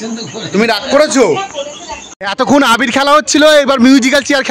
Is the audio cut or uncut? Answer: cut